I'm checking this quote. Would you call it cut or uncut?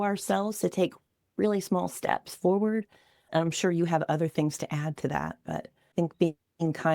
cut